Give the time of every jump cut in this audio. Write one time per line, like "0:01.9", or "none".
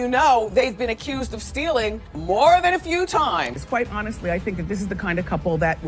0:03.5